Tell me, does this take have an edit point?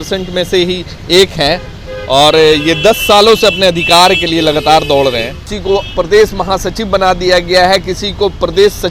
yes; 1 cut; at 5.5 s

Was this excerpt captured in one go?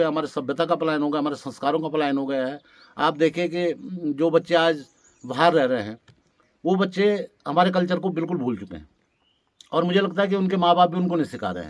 yes; 0 cuts

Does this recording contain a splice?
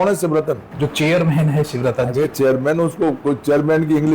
yes; 1 cut; at 2.1 s

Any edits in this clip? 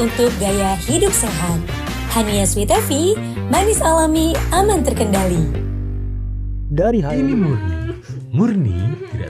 yes; 1 cut; at 7.1 s

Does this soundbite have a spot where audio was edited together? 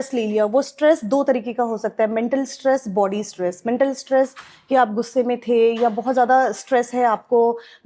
no; 0 cuts

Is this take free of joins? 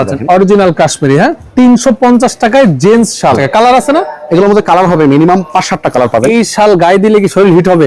no; 3 cuts; at 1.4 s, 3.4 s, 6.3 s

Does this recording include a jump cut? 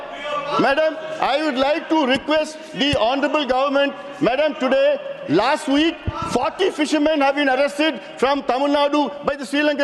no; 0 cuts

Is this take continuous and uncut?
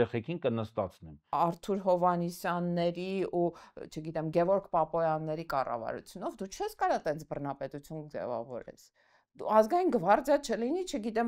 no; 1 cut; at 1.2 s

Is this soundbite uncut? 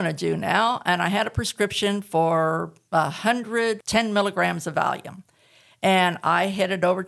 no; 1 cut; at 3.8 s

